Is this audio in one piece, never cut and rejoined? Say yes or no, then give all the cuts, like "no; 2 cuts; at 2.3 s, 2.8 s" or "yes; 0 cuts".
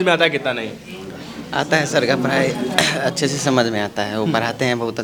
yes; 0 cuts